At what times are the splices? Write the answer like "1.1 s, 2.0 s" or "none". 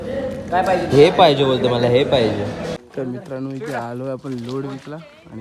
2.8 s